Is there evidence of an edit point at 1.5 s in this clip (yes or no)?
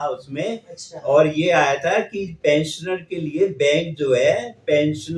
no